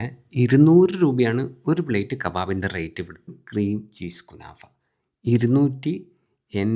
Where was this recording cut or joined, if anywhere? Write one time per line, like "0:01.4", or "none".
0:03.4